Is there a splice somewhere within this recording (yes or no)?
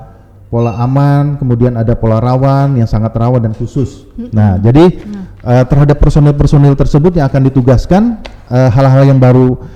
no